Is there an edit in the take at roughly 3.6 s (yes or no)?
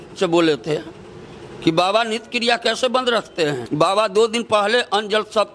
yes